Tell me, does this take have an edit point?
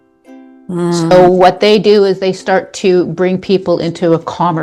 no; 0 cuts

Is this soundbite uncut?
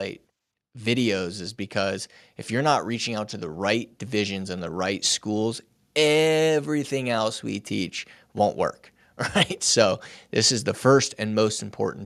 yes; 0 cuts

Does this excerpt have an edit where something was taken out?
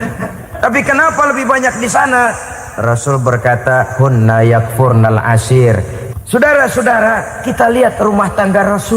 yes; 1 cut; at 6.0 s

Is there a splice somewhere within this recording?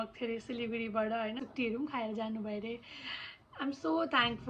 yes; 1 cut; at 1.4 s

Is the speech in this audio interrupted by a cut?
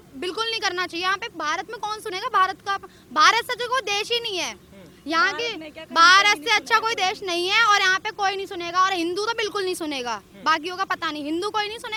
no; 0 cuts

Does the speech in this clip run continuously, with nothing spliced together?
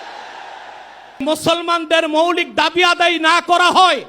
no; 1 cut; at 1.2 s

